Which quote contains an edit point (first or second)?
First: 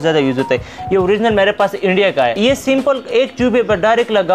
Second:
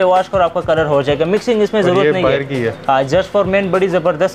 first